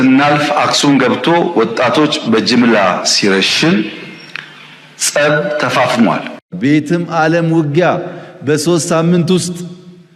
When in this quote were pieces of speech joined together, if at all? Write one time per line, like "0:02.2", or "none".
0:06.5